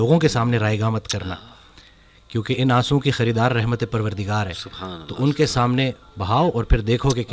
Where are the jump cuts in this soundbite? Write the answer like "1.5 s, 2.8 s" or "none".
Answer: none